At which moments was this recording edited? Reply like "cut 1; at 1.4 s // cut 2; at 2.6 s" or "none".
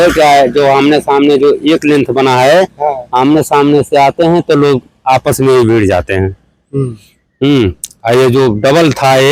none